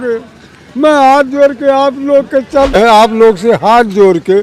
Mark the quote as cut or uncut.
cut